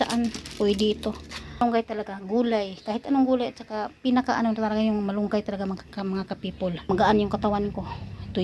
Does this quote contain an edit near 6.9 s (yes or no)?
yes